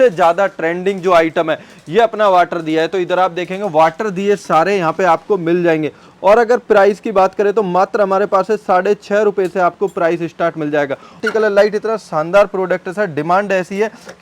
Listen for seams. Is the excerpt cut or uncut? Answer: cut